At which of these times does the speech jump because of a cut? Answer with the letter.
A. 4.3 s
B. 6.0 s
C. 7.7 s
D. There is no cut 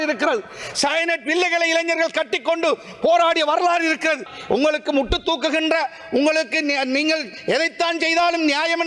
A